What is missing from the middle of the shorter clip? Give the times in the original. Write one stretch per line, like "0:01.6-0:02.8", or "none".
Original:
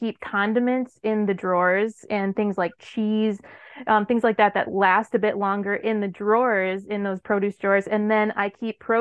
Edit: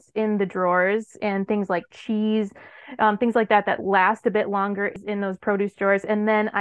0:05.8-0:06.8